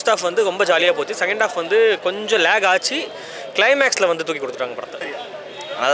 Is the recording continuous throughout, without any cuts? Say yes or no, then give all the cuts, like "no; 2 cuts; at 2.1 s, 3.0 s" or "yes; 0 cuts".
no; 1 cut; at 5.0 s